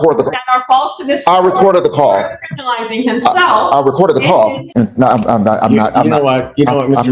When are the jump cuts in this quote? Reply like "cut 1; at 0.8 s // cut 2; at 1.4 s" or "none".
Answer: cut 1; at 4.6 s